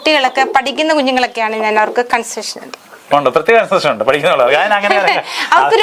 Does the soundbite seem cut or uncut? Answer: uncut